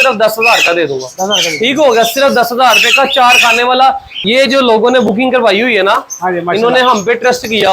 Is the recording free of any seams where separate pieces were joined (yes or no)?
no